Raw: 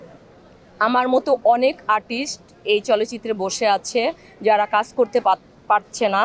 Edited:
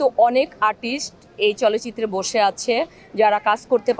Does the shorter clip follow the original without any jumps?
yes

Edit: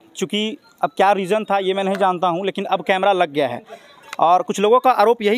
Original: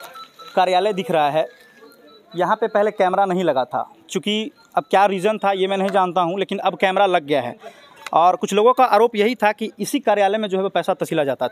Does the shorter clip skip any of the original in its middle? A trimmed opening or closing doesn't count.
no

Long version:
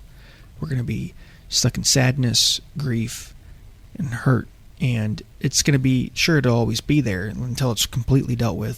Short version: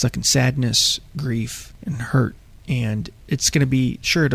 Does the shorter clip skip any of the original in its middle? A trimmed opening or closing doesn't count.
yes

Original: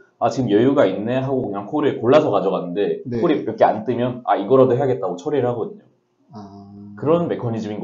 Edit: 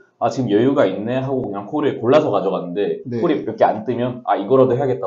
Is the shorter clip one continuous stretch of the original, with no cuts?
yes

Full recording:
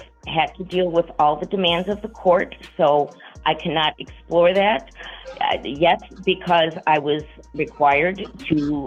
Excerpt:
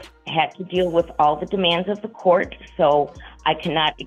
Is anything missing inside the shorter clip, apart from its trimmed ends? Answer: no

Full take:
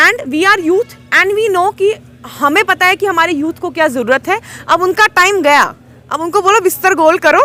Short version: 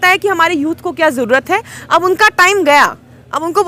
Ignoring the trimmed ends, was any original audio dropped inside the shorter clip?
no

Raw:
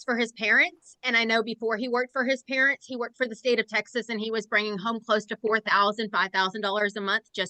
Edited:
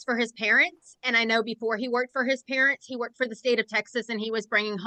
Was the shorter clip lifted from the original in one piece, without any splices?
yes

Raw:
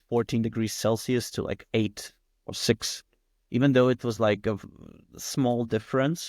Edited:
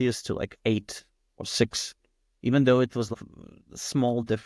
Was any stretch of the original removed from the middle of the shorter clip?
yes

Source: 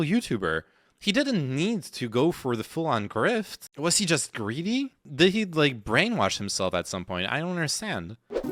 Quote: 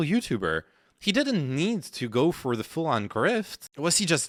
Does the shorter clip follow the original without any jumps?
yes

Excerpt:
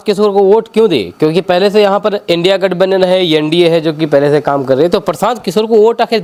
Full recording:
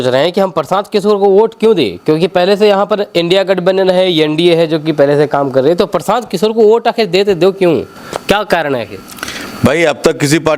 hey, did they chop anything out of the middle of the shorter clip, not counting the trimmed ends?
no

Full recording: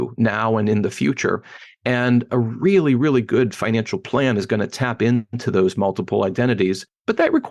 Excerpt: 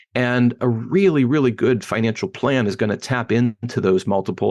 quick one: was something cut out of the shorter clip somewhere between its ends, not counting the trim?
no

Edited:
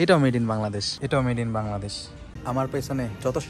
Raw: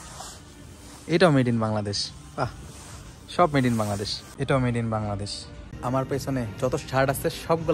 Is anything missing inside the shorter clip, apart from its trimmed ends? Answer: yes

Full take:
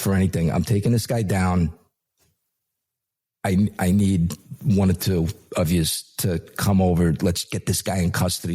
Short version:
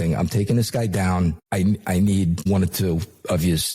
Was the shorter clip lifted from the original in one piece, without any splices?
no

